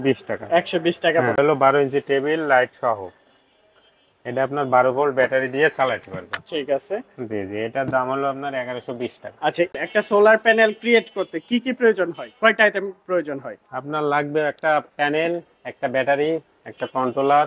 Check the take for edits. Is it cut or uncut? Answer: cut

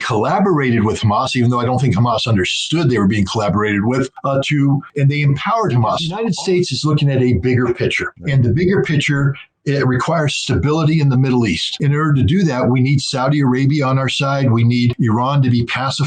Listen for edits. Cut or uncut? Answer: cut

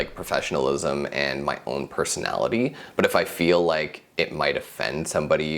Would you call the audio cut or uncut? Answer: uncut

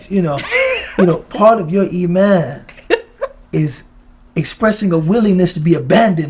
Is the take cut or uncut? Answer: uncut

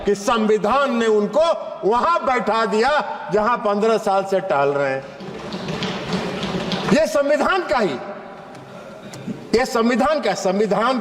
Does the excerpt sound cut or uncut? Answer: uncut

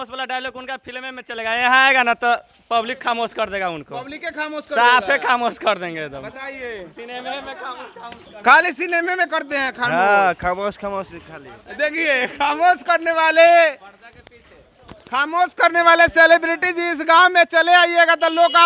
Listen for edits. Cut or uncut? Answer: uncut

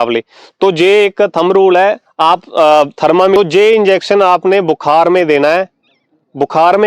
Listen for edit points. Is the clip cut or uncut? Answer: cut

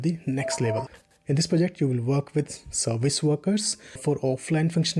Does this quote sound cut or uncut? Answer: cut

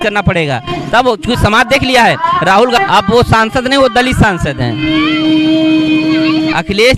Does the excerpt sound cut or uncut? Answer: cut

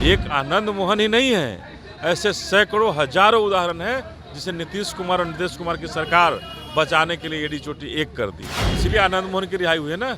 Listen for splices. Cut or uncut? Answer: cut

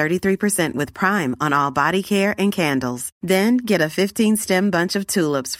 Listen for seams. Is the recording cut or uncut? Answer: uncut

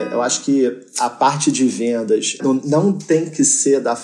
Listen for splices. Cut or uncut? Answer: cut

